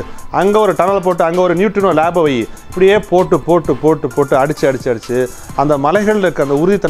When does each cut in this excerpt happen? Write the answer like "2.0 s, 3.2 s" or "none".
2.6 s